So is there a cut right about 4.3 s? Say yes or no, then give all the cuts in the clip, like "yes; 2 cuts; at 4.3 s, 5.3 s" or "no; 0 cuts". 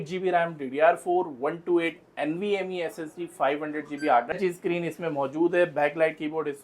yes; 1 cut; at 4.3 s